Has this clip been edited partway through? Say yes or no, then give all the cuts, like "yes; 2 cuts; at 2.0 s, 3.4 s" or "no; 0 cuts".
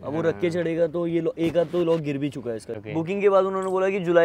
yes; 1 cut; at 2.7 s